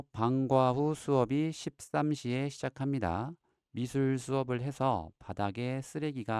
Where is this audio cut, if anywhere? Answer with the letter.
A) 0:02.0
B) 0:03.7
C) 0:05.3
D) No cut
D